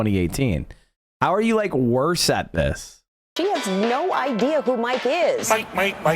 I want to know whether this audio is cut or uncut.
cut